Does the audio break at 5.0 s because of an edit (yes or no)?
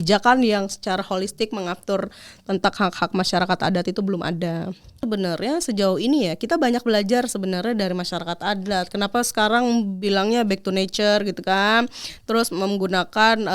yes